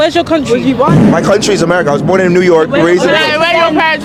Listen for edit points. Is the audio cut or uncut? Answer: uncut